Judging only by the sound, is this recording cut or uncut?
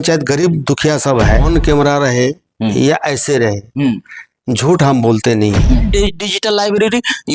cut